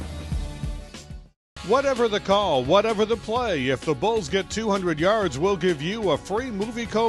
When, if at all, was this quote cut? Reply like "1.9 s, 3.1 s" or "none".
0.9 s